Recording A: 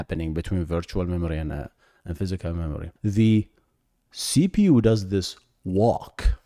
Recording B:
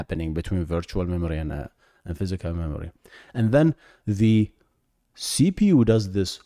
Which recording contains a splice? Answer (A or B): A